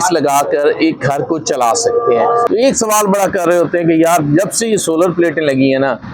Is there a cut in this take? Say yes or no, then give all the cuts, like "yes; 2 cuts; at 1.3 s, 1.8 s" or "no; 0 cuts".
yes; 1 cut; at 2.4 s